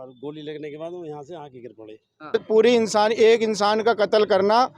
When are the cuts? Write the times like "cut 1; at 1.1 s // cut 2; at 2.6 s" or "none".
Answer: cut 1; at 2.3 s